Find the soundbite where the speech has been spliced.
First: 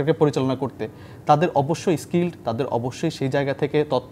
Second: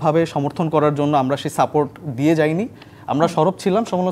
second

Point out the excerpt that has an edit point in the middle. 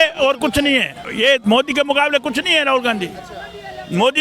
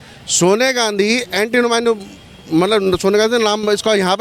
first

